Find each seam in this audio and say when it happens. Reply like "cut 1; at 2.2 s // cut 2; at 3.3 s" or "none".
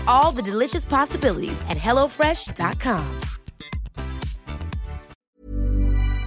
cut 1; at 5.4 s